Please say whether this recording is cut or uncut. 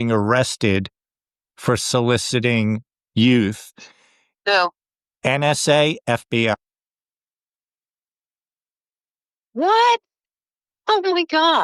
uncut